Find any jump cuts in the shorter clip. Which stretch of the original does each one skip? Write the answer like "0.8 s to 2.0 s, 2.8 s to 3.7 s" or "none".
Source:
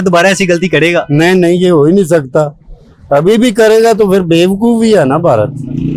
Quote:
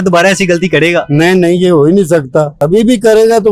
2.6 s to 3.1 s